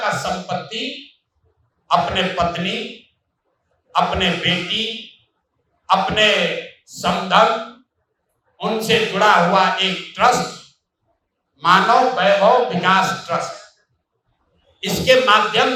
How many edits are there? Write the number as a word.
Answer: zero